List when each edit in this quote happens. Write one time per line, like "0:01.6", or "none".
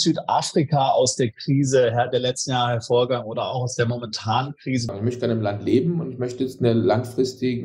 0:04.9